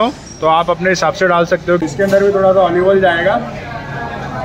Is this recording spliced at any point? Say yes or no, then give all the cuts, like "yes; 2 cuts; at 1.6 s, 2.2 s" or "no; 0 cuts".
yes; 1 cut; at 1.8 s